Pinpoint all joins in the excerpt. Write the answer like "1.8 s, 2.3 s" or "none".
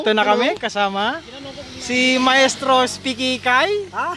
none